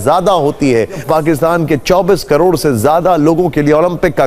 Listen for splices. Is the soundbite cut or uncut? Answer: cut